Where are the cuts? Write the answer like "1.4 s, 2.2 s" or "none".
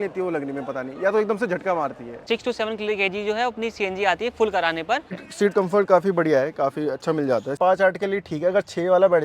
2.2 s, 5.2 s, 7.6 s